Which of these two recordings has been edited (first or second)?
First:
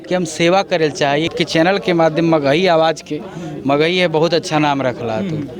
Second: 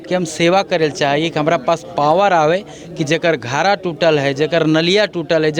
first